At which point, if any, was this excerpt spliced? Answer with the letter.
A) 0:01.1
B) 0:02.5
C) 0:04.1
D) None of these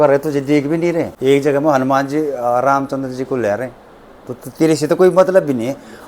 A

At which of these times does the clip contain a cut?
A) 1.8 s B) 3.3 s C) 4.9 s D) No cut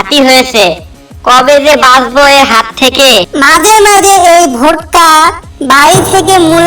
B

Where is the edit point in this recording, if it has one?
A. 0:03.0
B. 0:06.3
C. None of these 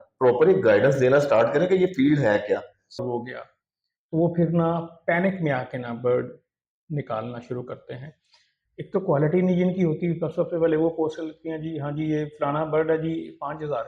A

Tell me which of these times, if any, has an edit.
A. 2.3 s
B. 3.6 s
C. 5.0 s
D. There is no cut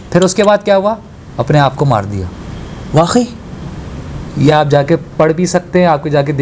D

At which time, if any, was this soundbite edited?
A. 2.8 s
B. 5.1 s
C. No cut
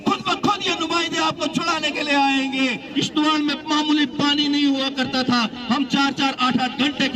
A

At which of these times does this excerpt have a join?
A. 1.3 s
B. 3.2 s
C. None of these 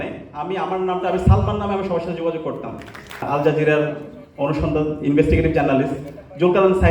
B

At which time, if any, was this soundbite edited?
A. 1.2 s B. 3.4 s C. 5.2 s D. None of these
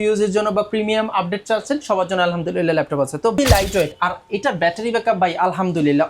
B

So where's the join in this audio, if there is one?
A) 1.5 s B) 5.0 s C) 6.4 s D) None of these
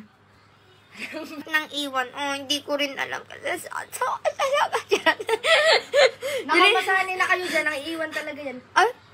A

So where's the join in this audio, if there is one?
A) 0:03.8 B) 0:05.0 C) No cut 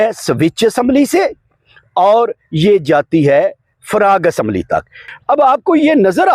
B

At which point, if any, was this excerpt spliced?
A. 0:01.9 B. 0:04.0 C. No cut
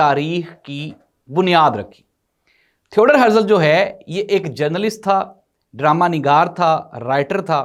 C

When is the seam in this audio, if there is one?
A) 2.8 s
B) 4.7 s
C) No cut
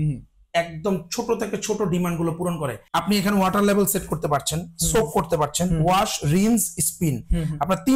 A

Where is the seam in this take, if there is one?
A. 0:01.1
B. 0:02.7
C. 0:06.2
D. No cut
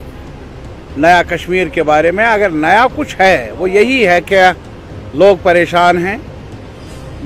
D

